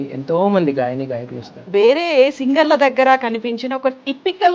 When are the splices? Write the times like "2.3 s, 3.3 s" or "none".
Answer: 1.6 s